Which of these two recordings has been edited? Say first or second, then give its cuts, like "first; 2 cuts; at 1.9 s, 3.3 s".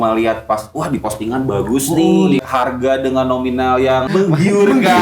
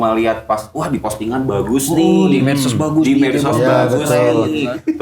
first; 2 cuts; at 2.4 s, 4.1 s